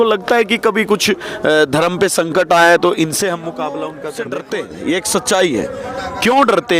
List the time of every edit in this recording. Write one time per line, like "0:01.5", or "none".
0:04.0